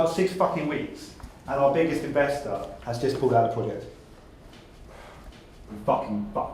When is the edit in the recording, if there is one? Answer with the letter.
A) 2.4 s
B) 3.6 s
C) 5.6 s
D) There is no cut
C